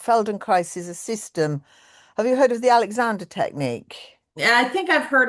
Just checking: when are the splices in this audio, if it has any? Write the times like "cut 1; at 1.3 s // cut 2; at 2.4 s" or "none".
none

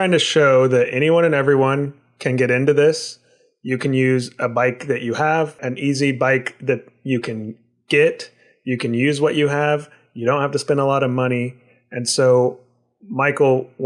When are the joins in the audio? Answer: cut 1; at 5.6 s

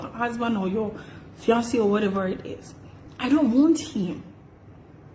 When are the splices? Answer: none

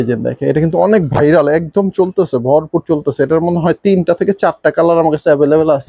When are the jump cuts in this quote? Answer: none

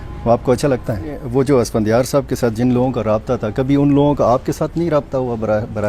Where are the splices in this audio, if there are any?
cut 1; at 1.2 s

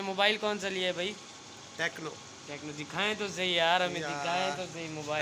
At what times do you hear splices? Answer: none

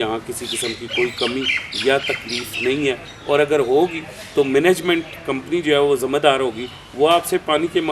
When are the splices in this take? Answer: none

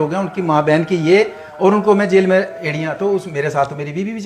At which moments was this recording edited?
none

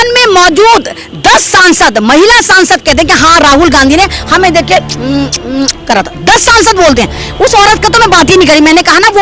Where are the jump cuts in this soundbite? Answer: none

